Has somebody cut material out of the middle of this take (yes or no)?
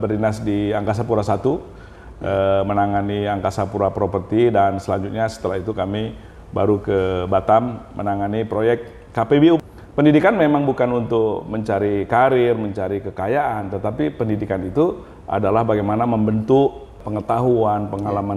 yes